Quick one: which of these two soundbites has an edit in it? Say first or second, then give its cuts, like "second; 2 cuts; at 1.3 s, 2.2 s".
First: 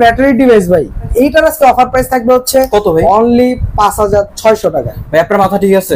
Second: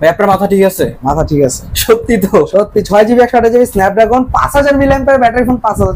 first; 1 cut; at 1.1 s